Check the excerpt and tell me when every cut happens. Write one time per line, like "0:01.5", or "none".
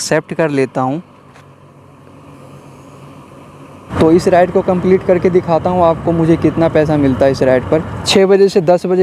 0:03.9
0:08.0

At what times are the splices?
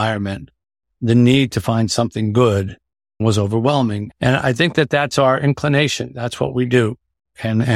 0:03.2
0:04.1

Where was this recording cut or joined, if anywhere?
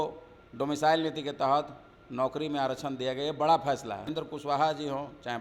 0:04.1

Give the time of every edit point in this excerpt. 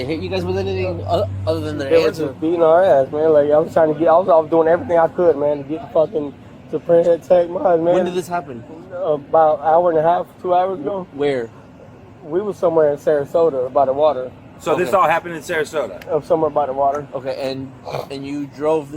none

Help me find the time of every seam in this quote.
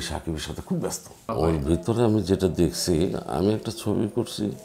0:01.3

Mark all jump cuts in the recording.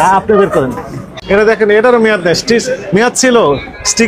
0:01.4

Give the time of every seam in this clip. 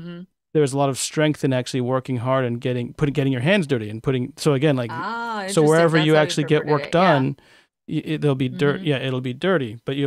none

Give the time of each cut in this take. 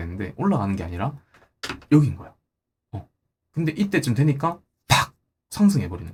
none

